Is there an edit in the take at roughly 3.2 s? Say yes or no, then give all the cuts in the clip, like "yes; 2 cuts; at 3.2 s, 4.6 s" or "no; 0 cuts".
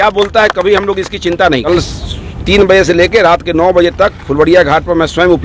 no; 1 cut; at 1.7 s